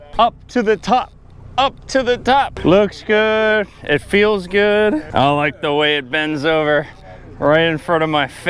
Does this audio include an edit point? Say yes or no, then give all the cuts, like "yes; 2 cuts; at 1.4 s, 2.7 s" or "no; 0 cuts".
yes; 2 cuts; at 2.5 s, 5.1 s